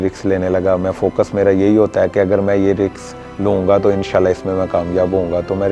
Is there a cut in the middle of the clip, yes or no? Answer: no